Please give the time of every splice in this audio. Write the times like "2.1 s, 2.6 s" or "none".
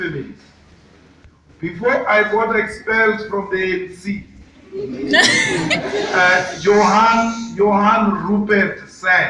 6.4 s